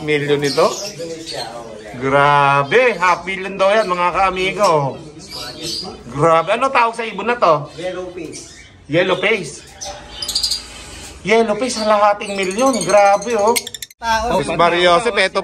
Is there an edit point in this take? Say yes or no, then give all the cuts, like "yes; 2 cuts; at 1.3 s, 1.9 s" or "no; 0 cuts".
yes; 1 cut; at 14.0 s